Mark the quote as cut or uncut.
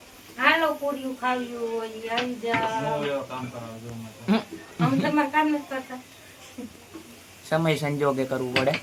uncut